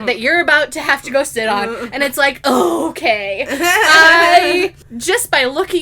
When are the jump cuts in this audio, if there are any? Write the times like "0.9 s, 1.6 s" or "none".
4.9 s